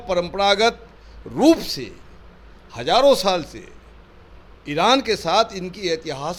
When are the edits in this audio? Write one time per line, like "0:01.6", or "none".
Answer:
none